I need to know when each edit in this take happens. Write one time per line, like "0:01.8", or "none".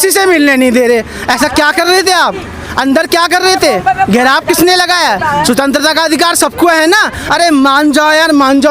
0:07.1